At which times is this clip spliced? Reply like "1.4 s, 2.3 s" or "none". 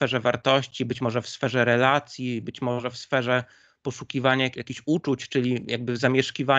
4.6 s